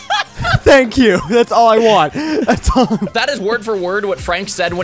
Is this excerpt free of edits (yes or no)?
no